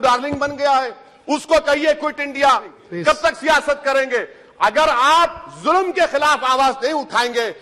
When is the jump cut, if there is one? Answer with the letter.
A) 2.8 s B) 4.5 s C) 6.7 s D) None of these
A